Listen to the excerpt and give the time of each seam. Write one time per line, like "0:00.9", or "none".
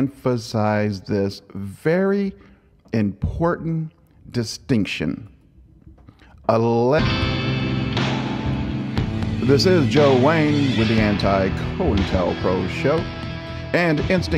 none